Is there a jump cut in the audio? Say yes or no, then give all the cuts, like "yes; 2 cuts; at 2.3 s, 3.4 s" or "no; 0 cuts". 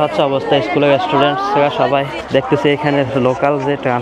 yes; 1 cut; at 2.2 s